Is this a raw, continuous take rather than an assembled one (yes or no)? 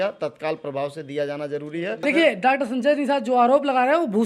no